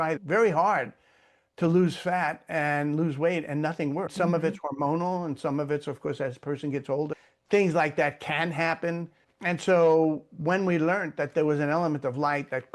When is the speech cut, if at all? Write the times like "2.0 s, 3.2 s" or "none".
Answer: 4.1 s, 7.1 s